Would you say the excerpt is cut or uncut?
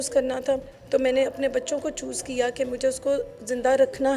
uncut